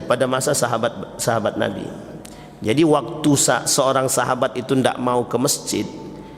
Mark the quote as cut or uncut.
uncut